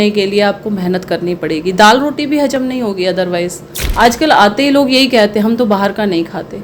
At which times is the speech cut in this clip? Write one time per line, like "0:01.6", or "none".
0:03.8